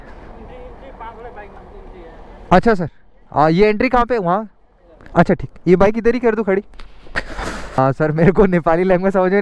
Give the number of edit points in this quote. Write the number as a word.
one